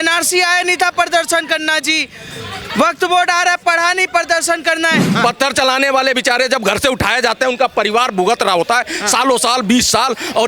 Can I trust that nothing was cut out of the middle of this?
no; 1 cut; at 5.1 s

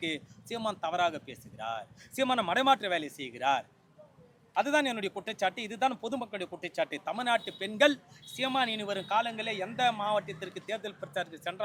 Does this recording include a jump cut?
no; 0 cuts

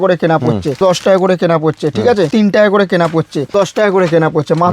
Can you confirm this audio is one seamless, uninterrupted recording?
no; 3 cuts; at 0.8 s, 2.3 s, 3.5 s

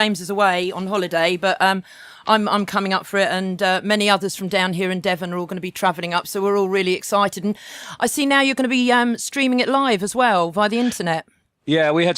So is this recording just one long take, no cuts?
no; 1 cut; at 2.4 s

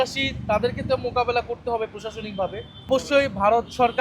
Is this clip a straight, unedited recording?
no; 1 cut; at 2.9 s

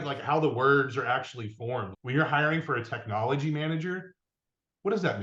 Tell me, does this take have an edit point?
yes; 1 cut; at 1.9 s

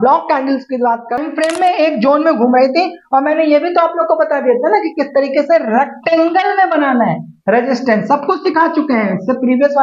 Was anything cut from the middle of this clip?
yes; 1 cut; at 1.2 s

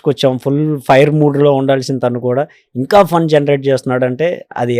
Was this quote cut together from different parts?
no; 0 cuts

